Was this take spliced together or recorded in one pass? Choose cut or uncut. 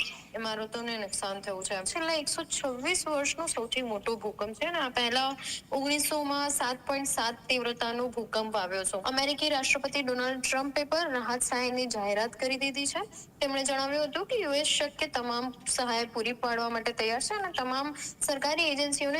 cut